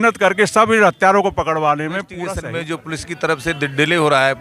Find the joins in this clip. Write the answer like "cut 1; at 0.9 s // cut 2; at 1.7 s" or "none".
cut 1; at 2.4 s